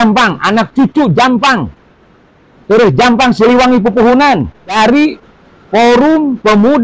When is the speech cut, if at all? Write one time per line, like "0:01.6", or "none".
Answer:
0:04.8